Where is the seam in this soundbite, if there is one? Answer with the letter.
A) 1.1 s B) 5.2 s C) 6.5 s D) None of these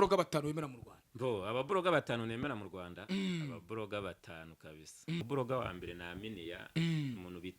B